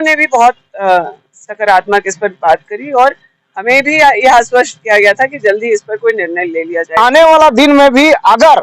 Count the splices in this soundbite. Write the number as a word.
one